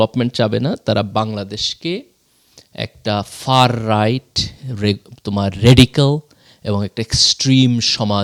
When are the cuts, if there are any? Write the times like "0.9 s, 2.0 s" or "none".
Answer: none